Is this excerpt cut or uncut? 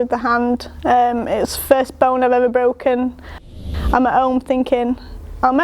cut